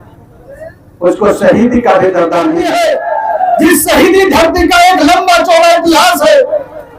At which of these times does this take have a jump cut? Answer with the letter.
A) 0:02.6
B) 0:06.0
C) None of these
A